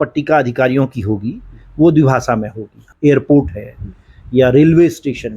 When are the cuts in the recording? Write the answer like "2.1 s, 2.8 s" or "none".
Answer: 2.8 s